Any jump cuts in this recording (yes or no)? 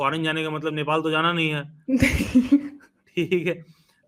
no